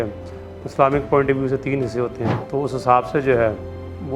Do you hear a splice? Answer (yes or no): yes